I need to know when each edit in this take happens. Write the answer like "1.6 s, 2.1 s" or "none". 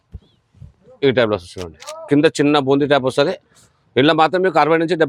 none